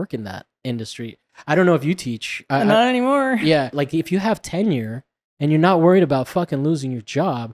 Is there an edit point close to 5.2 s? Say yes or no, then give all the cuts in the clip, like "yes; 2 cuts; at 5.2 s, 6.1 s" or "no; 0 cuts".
no; 2 cuts; at 1.3 s, 3.7 s